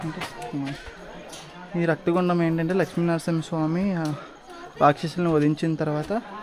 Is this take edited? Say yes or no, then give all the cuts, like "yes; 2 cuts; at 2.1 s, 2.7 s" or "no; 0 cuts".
no; 0 cuts